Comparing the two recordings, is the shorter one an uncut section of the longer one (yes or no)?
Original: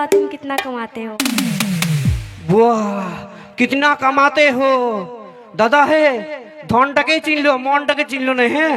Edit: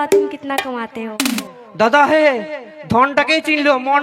no